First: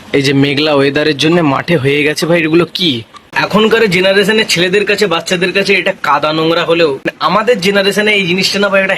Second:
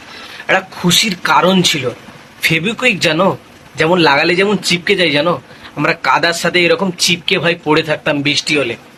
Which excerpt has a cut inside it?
first; 2 cuts; at 3.4 s, 7.0 s

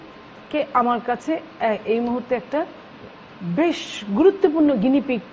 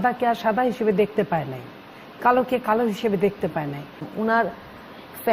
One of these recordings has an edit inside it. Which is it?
second; 1 cut; at 4.1 s

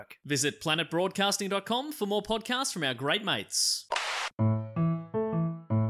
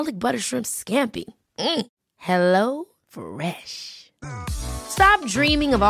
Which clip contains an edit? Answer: first; 1 cut; at 4.4 s

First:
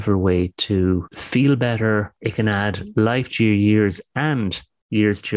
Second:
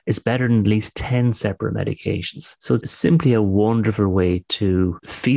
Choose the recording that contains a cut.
second; 1 cut; at 2.9 s

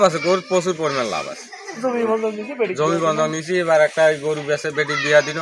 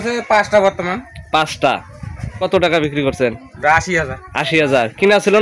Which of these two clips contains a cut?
second; 1 cut; at 2.4 s

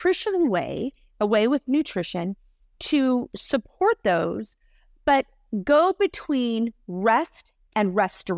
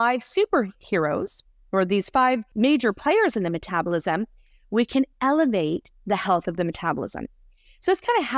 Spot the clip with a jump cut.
second; 1 cut; at 2.5 s

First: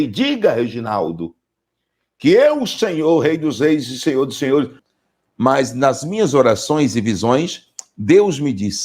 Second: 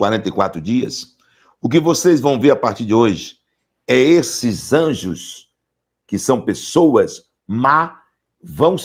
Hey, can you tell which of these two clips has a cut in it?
first; 1 cut; at 4.9 s

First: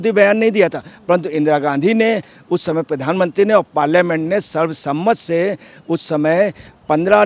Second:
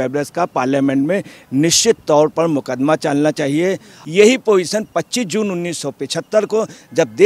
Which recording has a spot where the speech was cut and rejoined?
second; 1 cut; at 3.9 s

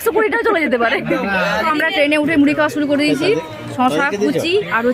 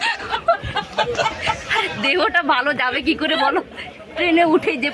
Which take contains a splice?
first; 1 cut; at 1.7 s

